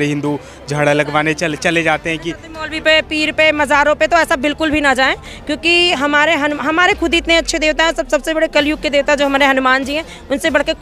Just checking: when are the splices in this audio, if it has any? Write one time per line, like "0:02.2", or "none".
none